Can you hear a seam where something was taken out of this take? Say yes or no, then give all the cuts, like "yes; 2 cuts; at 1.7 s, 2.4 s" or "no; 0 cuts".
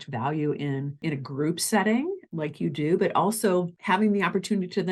yes; 3 cuts; at 1.0 s, 2.2 s, 3.8 s